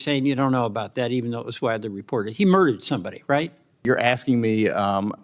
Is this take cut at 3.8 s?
yes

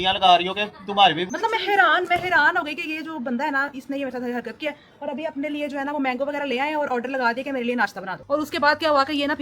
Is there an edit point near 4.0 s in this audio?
no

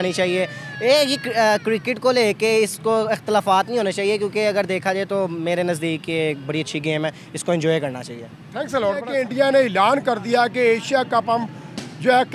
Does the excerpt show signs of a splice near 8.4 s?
no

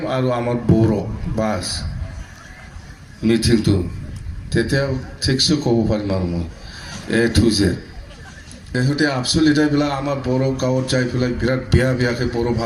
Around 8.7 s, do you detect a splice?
yes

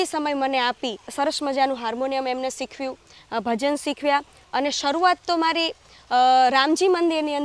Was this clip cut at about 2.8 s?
no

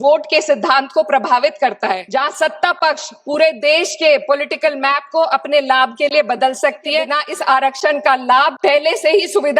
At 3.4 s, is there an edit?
no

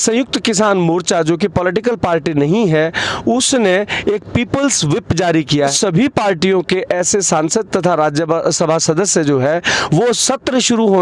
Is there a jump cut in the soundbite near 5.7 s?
yes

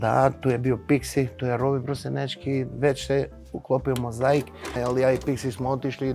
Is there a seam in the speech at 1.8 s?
no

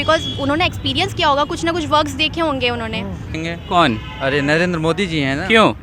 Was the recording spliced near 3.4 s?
yes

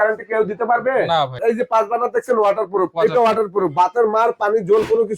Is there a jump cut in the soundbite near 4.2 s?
no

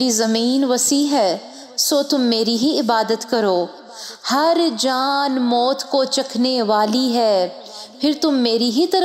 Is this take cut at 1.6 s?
no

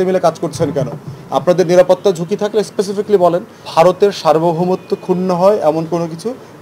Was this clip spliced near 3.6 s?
yes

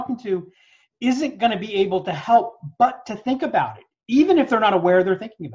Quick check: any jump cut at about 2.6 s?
no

